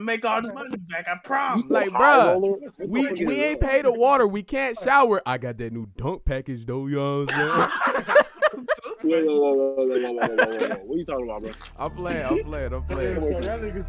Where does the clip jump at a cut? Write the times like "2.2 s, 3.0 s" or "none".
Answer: none